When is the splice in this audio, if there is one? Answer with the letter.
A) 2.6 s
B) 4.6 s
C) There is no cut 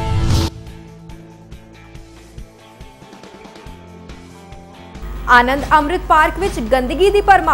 B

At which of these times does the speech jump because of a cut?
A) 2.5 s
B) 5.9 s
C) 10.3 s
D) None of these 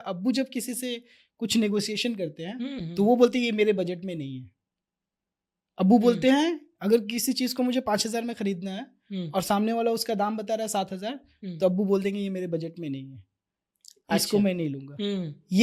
D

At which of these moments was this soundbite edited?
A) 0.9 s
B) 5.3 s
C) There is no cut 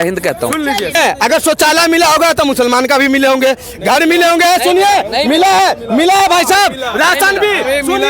A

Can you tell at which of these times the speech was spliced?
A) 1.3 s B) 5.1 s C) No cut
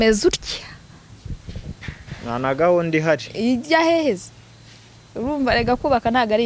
C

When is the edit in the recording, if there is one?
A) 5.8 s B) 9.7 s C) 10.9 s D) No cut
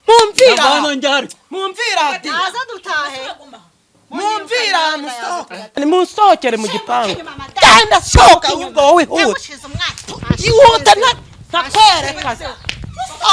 A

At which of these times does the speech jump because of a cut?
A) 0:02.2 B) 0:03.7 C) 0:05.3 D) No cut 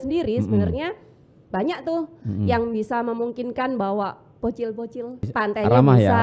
C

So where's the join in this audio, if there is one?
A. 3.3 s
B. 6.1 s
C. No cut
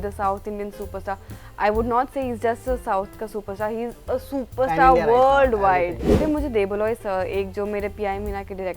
B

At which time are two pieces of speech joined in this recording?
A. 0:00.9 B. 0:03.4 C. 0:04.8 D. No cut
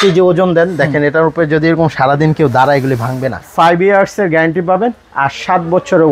B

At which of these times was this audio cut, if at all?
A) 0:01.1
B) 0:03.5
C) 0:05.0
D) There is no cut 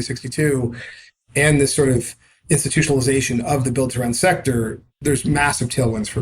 C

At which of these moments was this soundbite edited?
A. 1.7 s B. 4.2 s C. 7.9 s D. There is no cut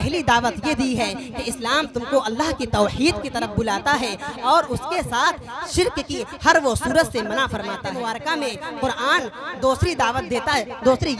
C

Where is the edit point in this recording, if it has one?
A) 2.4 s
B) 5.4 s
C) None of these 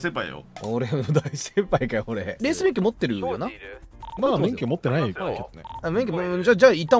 A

